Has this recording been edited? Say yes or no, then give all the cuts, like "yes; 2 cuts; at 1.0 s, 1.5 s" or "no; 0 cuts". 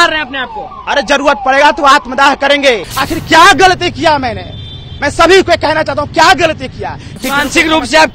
yes; 2 cuts; at 2.9 s, 7.2 s